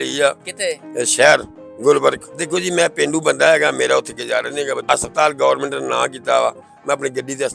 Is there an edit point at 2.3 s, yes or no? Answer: yes